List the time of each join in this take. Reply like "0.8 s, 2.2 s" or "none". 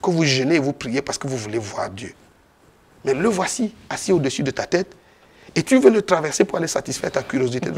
none